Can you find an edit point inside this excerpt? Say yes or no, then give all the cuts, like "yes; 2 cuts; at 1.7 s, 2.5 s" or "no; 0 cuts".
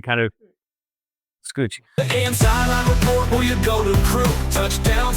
yes; 1 cut; at 1.9 s